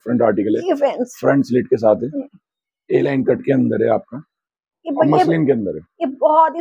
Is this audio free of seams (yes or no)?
yes